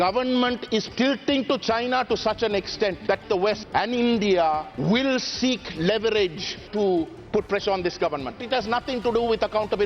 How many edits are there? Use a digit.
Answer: 4